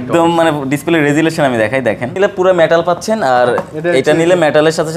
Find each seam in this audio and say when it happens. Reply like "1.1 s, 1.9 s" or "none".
2.2 s